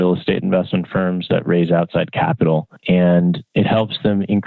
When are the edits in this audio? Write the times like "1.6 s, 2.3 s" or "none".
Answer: none